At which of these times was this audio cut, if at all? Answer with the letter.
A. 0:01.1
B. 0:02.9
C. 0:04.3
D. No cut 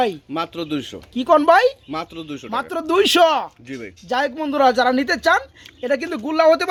D